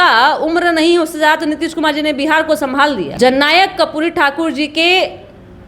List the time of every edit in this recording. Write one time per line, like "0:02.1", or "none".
0:03.2